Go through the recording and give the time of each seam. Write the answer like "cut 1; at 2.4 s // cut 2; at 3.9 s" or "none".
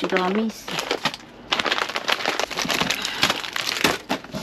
cut 1; at 1.0 s // cut 2; at 2.5 s